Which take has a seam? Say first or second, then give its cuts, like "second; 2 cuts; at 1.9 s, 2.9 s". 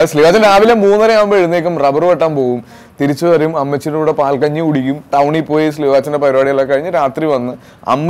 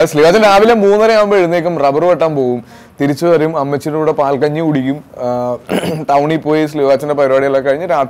first; 1 cut; at 5.0 s